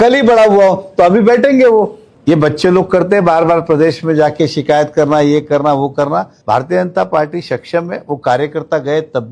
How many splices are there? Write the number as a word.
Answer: two